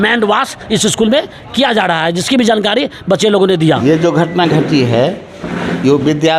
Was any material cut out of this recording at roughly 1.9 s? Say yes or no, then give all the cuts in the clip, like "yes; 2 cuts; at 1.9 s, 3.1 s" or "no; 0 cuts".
no; 1 cut; at 3.8 s